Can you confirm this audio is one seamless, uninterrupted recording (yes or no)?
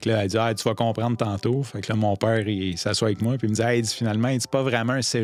yes